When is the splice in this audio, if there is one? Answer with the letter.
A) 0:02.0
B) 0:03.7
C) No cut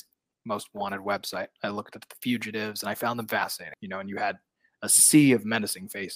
B